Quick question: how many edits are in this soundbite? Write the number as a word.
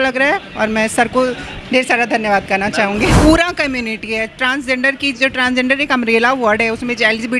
one